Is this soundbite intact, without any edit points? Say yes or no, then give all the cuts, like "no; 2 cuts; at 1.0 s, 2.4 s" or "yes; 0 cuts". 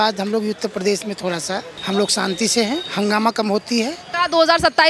no; 3 cuts; at 1.7 s, 2.9 s, 4.0 s